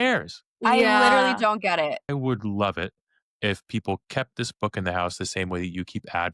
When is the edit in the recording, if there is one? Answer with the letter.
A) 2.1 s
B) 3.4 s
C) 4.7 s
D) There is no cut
A